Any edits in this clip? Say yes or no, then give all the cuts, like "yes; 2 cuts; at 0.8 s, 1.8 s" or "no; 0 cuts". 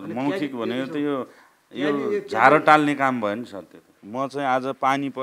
yes; 1 cut; at 4.0 s